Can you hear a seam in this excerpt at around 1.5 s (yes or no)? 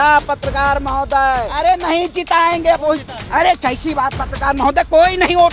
yes